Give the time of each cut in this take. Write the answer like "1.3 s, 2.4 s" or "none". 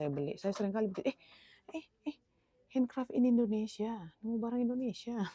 none

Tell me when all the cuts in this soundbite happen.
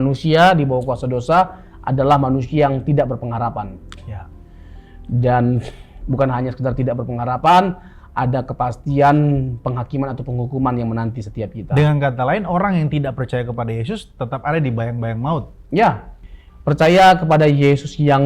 16.2 s

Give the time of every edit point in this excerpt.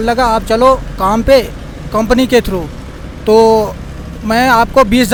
none

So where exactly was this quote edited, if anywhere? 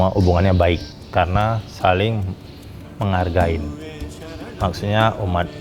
0.9 s

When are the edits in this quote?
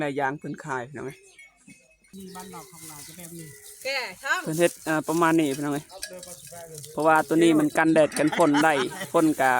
2.0 s

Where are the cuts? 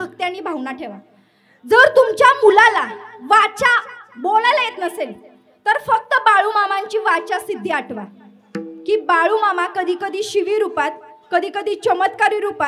none

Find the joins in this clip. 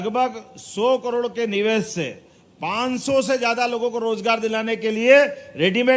none

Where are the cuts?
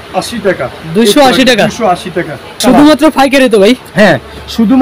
2.5 s

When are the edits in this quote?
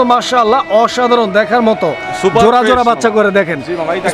none

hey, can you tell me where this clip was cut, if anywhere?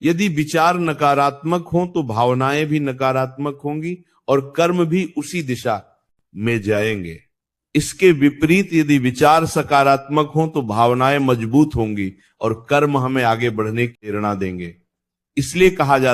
14.1 s

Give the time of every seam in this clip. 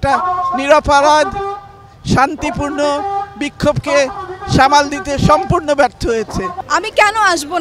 6.6 s

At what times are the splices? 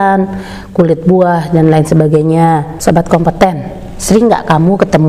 2.7 s

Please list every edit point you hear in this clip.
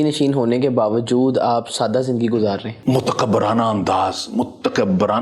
2.7 s

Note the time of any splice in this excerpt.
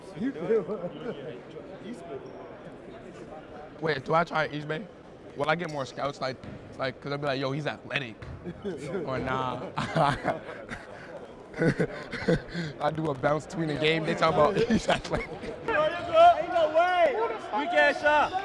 15.7 s

